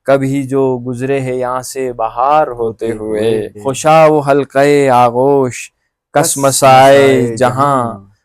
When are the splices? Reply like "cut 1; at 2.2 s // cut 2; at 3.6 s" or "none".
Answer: cut 1; at 3.5 s